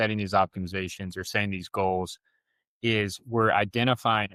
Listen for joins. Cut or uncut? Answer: uncut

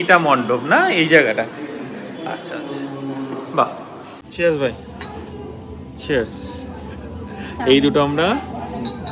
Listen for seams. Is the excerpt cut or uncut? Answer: cut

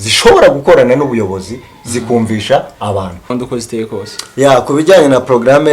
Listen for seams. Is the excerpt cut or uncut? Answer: cut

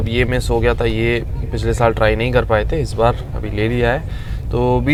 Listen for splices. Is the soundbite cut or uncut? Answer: uncut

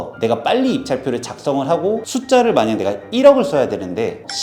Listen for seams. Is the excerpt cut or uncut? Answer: cut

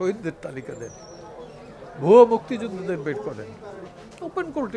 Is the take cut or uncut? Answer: uncut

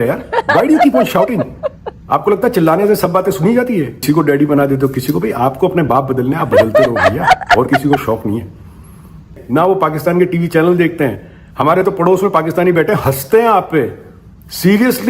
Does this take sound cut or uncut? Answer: cut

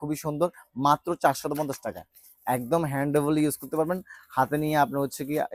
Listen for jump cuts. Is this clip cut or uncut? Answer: uncut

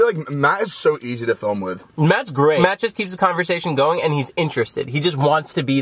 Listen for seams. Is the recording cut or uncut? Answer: cut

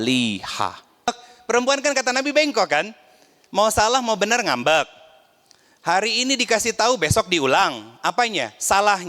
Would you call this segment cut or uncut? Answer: cut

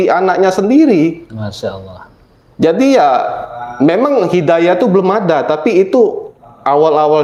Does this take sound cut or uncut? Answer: uncut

